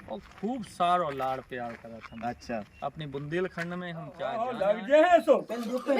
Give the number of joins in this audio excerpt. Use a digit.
1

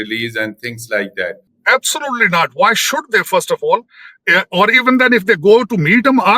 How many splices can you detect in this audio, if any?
1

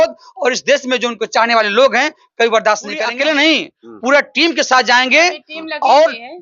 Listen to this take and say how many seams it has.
1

